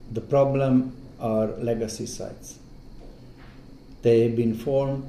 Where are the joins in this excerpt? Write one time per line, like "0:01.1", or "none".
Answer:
none